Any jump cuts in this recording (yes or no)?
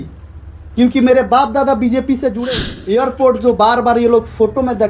yes